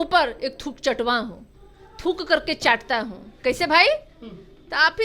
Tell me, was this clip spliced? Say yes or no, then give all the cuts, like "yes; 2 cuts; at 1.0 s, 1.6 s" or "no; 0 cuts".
no; 0 cuts